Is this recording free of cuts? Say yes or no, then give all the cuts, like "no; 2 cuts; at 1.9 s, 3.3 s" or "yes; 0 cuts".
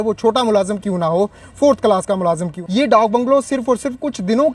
no; 1 cut; at 2.5 s